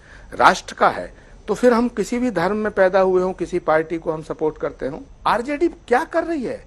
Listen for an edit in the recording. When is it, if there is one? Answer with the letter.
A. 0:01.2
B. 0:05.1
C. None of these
B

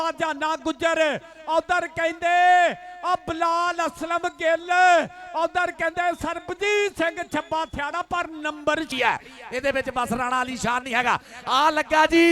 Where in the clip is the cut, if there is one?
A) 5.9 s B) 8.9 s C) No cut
B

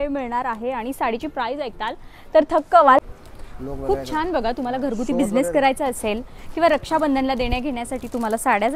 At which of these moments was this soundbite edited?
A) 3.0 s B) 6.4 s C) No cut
A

